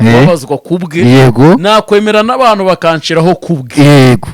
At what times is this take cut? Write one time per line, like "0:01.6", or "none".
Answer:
none